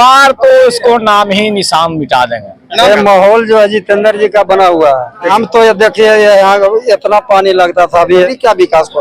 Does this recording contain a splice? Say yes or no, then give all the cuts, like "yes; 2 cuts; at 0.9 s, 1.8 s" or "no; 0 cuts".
yes; 3 cuts; at 2.9 s, 5.3 s, 8.3 s